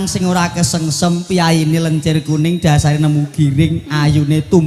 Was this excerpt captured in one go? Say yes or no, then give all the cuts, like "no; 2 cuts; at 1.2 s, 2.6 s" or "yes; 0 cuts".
yes; 0 cuts